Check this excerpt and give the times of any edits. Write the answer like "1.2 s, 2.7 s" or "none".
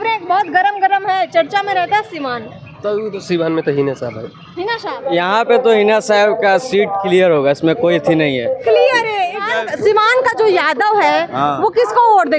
5.0 s, 9.5 s